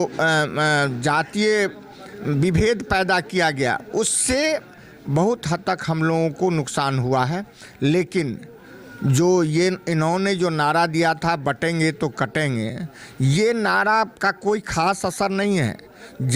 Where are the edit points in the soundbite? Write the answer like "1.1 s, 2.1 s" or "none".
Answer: none